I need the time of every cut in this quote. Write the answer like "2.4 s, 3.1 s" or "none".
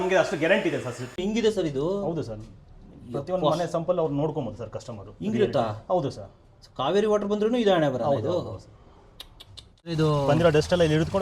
1.2 s, 9.9 s

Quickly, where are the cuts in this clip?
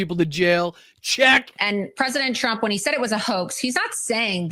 1.6 s

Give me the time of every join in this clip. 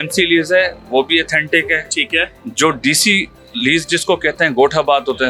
none

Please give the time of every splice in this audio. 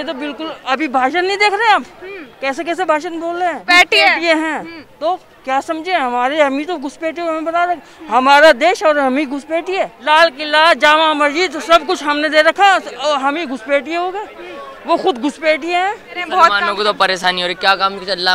3.6 s, 10.0 s, 16.3 s

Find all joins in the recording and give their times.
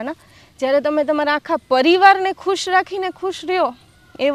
none

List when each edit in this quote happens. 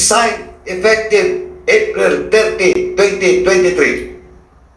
none

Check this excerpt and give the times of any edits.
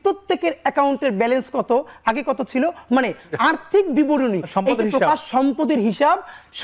none

